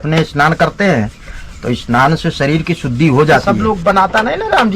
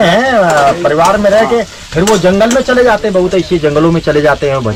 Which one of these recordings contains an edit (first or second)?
first